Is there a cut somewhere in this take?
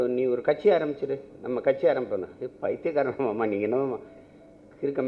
no; 0 cuts

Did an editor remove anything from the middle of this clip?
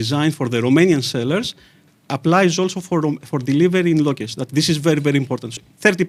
no; 0 cuts

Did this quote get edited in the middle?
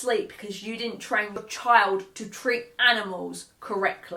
no; 0 cuts

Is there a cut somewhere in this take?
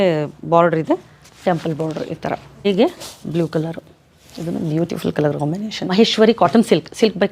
yes; 2 cuts; at 2.7 s, 5.9 s

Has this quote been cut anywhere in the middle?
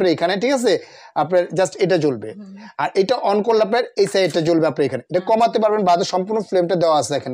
no; 0 cuts

